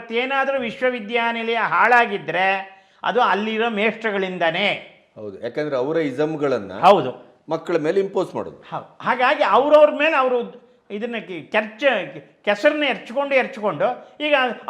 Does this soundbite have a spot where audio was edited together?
no; 0 cuts

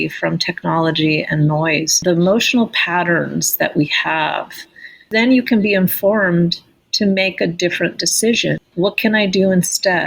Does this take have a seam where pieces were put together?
yes; 3 cuts; at 2.0 s, 5.1 s, 8.6 s

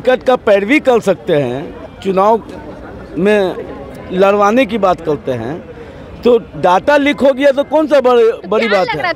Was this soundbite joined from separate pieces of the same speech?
no; 0 cuts

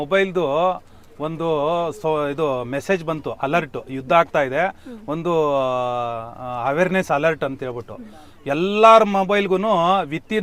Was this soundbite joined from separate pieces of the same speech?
no; 0 cuts

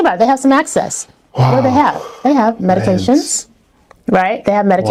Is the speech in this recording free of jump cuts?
yes; 0 cuts

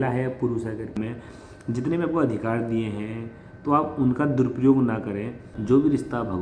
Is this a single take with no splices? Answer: no; 2 cuts; at 1.0 s, 5.5 s

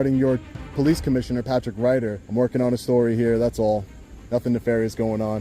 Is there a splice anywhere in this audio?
yes; 1 cut; at 2.1 s

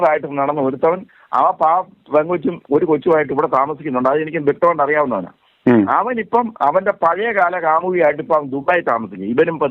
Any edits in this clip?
no; 0 cuts

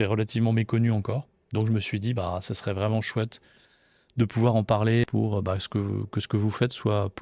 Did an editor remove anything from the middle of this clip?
yes; 1 cut; at 5.0 s

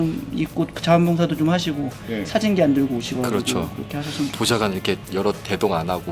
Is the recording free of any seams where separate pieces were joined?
yes; 0 cuts

